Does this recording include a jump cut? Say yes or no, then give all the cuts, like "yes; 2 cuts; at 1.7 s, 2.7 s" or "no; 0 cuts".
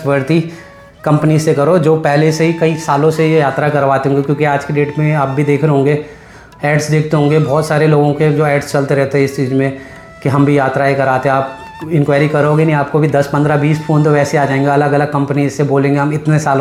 no; 0 cuts